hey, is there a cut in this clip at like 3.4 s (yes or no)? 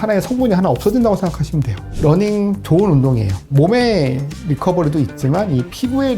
yes